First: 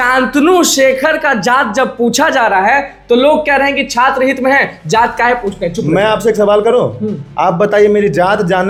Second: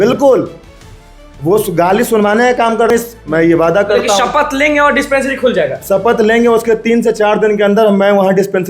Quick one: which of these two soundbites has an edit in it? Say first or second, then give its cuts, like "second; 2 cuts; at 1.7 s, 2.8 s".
second; 1 cut; at 2.9 s